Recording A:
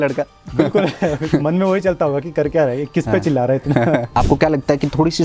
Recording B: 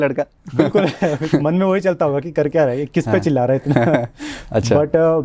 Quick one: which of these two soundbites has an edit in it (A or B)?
A